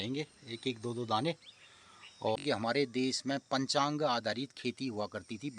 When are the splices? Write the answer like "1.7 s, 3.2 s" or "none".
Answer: 2.4 s